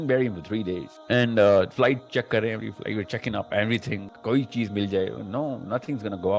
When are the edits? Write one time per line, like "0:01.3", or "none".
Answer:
0:00.9
0:04.1